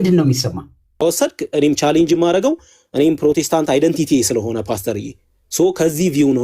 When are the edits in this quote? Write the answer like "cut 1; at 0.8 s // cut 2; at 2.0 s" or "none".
cut 1; at 1.0 s